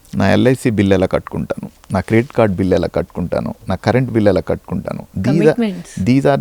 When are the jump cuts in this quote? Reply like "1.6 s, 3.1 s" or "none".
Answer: none